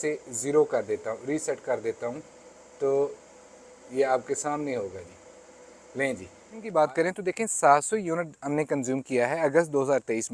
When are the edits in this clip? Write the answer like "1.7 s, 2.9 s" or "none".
6.6 s